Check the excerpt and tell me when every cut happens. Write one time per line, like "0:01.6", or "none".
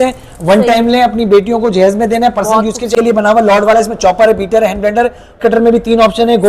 0:02.9
0:05.4